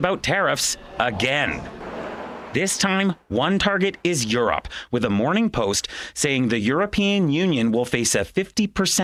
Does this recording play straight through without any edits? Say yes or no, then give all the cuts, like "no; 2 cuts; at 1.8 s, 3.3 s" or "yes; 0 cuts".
yes; 0 cuts